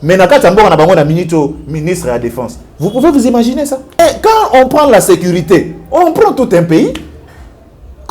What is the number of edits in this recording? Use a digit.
1